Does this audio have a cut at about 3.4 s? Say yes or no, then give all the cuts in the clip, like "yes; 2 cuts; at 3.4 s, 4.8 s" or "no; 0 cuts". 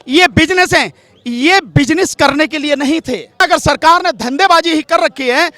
yes; 1 cut; at 3.4 s